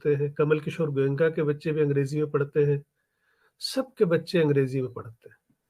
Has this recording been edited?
no; 0 cuts

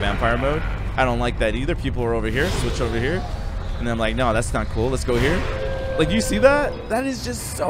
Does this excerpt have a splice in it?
no; 0 cuts

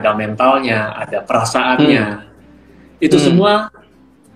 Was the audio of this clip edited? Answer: no; 0 cuts

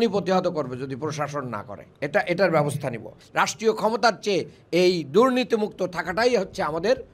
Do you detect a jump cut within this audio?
yes; 1 cut; at 3.1 s

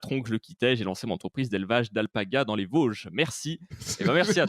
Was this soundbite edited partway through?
no; 0 cuts

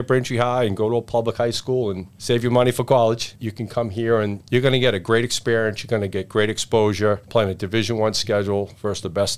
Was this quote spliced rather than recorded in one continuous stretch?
yes; 3 cuts; at 2.1 s, 4.4 s, 7.2 s

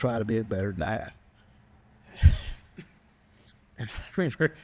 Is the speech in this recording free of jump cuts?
yes; 0 cuts

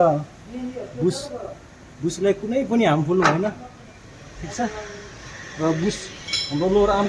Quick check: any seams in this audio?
no; 0 cuts

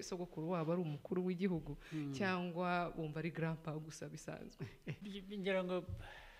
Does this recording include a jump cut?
yes; 1 cut; at 5.0 s

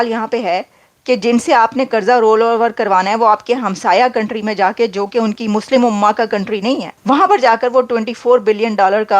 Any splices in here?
yes; 1 cut; at 6.9 s

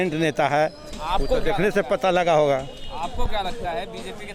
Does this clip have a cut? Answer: no; 0 cuts

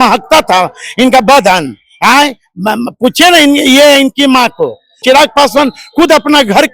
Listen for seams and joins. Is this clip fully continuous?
no; 1 cut; at 5.0 s

